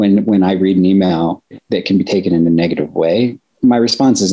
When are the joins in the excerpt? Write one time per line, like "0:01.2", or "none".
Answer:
0:01.6
0:03.5